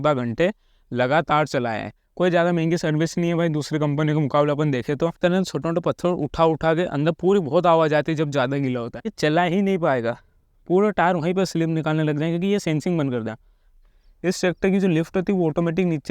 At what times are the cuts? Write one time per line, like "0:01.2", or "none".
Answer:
0:02.0
0:05.2
0:09.1
0:13.8